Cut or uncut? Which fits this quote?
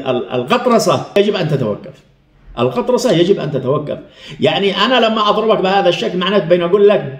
cut